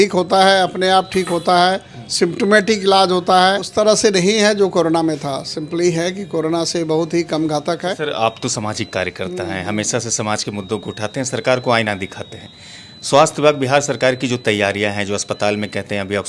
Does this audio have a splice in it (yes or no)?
yes